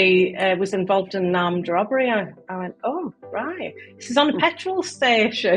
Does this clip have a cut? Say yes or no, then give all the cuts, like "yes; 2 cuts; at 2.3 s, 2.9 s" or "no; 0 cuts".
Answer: no; 0 cuts